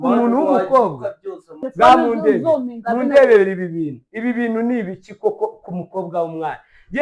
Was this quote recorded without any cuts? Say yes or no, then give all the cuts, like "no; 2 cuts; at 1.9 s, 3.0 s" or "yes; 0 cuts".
no; 1 cut; at 1.6 s